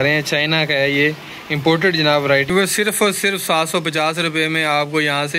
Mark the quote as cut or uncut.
cut